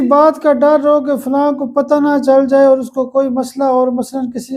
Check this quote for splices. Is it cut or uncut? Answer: uncut